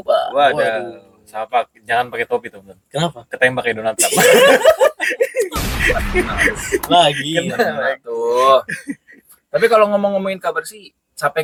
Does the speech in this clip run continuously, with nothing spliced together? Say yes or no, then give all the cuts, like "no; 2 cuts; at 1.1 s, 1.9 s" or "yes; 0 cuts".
yes; 0 cuts